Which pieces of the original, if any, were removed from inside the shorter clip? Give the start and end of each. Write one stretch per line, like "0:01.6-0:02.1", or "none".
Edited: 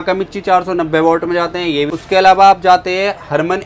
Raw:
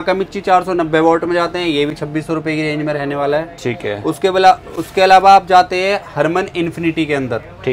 0:02.0-0:04.8